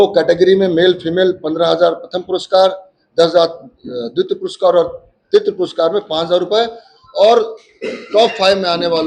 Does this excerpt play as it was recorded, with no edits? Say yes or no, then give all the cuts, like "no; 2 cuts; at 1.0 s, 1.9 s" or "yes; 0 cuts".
yes; 0 cuts